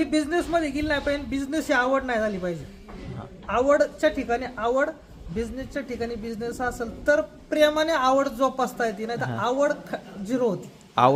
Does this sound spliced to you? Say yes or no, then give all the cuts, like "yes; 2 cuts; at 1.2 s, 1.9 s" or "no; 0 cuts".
no; 0 cuts